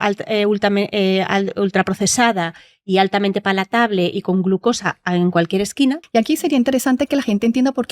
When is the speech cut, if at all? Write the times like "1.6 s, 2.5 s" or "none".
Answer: 6.0 s